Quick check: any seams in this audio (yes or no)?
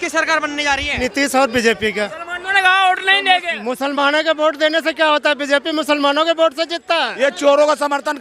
yes